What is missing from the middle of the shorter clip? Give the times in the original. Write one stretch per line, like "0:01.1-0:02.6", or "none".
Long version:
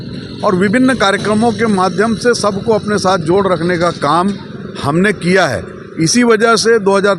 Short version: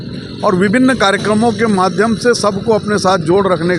none